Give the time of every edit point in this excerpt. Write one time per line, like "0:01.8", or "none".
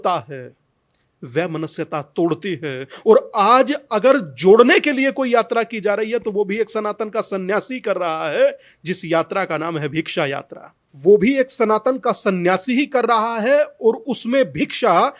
none